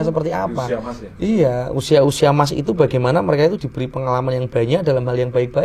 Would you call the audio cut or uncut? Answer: uncut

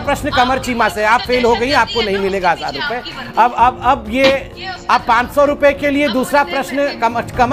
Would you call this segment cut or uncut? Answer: uncut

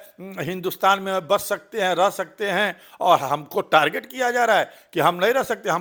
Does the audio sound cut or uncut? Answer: uncut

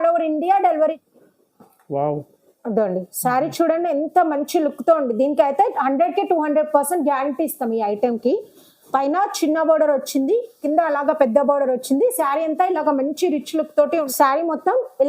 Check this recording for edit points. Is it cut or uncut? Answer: cut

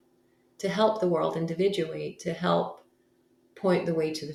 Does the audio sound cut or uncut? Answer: uncut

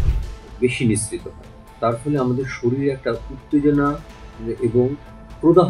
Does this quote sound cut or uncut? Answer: uncut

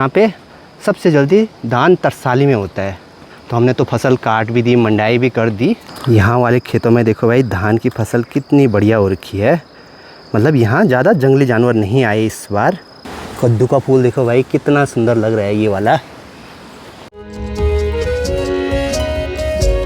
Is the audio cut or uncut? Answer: uncut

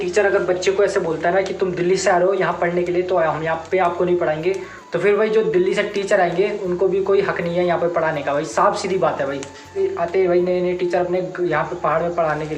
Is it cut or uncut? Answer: cut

